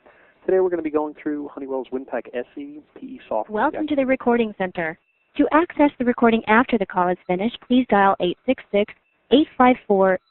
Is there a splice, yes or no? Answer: yes